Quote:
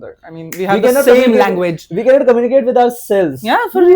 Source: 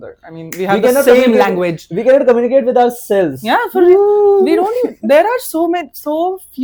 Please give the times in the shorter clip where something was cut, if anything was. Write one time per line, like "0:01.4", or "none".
none